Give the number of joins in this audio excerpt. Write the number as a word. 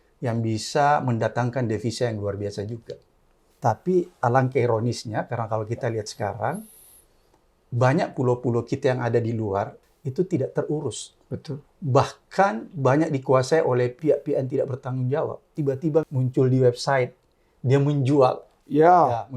three